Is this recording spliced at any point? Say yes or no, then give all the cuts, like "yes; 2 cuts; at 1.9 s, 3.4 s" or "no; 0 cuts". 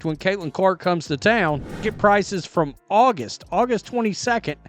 yes; 1 cut; at 1.7 s